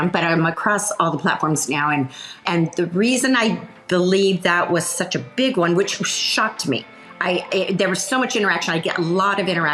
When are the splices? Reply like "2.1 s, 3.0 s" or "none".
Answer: 2.4 s